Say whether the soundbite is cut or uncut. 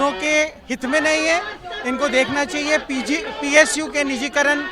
uncut